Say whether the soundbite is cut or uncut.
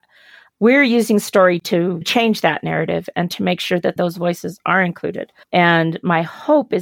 cut